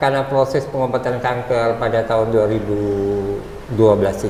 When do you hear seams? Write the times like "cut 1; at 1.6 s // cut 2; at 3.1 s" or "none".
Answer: none